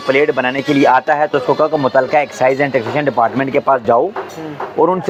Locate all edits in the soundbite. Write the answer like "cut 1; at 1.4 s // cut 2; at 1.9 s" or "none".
none